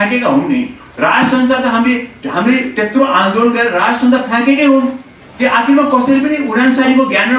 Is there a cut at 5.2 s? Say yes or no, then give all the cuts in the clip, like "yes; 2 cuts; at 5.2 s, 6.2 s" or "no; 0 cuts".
no; 0 cuts